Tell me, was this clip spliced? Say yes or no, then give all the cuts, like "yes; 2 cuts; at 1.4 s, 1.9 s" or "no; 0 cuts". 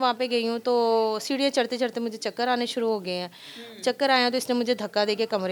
no; 0 cuts